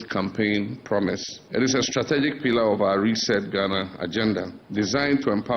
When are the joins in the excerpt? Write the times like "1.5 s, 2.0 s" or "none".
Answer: 1.3 s, 4.6 s